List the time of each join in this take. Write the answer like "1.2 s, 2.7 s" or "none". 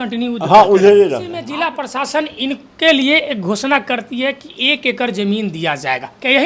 1.4 s